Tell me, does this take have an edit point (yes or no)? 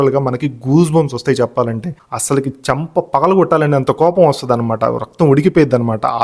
yes